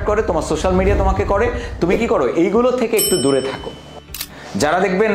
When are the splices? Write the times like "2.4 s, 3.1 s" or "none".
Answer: 4.2 s